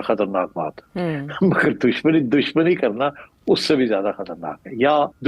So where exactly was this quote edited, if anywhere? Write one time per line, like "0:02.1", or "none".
none